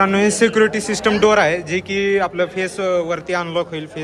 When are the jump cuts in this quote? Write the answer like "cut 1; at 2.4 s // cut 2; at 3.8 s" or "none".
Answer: none